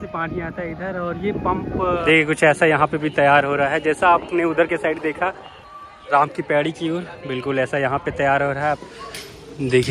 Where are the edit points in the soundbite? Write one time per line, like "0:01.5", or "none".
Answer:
0:02.0
0:08.8